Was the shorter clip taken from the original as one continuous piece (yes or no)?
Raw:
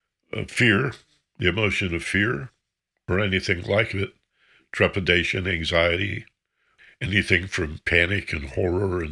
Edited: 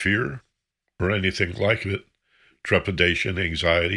yes